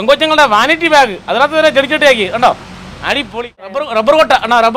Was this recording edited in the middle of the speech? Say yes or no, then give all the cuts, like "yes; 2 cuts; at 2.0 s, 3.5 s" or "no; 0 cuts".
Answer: yes; 1 cut; at 3.8 s